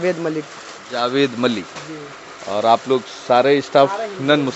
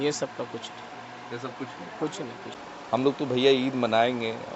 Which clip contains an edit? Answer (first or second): second